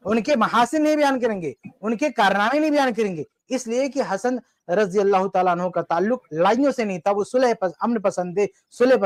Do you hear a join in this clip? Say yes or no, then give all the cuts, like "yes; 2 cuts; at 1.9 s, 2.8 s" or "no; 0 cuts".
no; 0 cuts